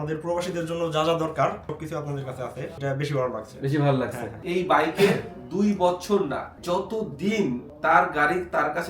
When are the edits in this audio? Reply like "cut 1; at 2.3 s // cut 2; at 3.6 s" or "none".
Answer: cut 1; at 4.4 s